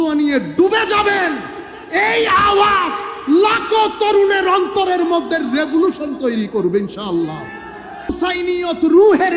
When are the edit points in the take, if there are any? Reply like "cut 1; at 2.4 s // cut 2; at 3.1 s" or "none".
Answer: cut 1; at 8.1 s